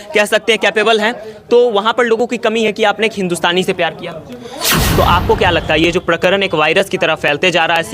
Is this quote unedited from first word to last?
no; 1 cut; at 4.8 s

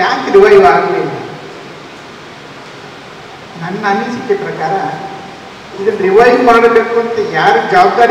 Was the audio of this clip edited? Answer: no; 0 cuts

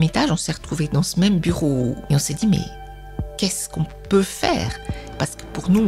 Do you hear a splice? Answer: yes; 2 cuts; at 2.0 s, 5.0 s

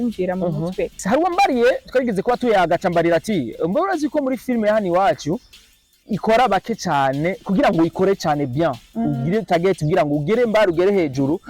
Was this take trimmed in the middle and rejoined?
yes; 1 cut; at 1.0 s

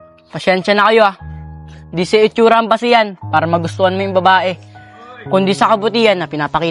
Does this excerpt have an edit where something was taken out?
no; 0 cuts

